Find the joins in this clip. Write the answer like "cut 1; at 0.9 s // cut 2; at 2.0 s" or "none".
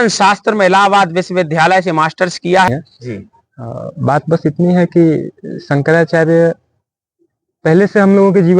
cut 1; at 2.7 s